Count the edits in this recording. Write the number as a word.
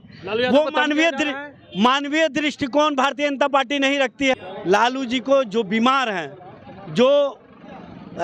one